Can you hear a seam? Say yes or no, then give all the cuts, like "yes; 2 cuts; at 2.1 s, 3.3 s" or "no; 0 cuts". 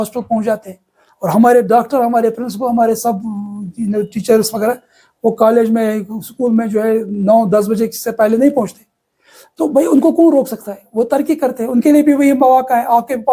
no; 0 cuts